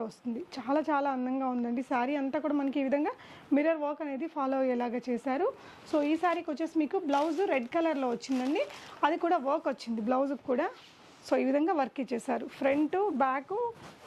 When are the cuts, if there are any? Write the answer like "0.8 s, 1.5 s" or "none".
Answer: none